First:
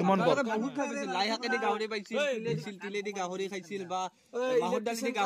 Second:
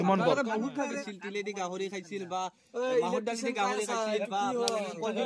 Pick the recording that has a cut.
second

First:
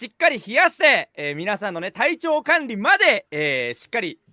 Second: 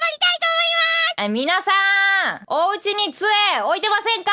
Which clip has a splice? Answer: second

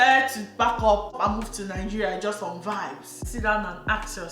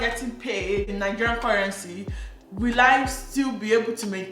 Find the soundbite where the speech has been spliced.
first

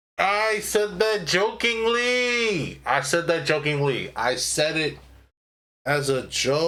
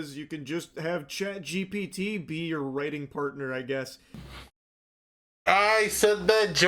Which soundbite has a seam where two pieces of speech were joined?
second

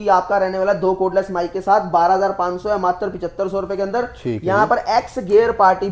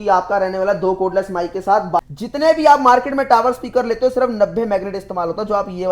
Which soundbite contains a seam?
second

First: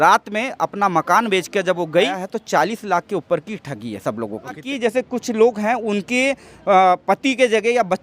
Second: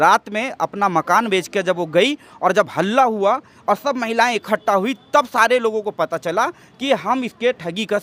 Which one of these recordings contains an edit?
first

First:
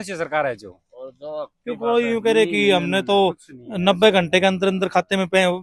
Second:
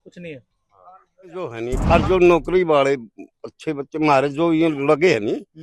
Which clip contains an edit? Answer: second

